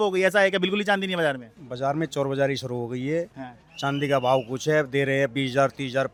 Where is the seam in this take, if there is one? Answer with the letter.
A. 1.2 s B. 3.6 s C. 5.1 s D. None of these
D